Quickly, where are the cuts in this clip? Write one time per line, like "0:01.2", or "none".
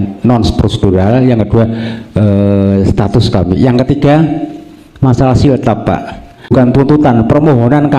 0:06.5